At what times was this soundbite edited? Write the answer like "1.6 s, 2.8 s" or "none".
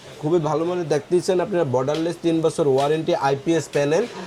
none